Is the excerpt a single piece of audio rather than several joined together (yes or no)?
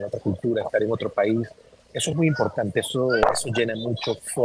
yes